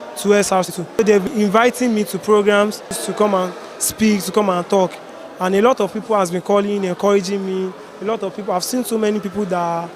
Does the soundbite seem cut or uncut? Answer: cut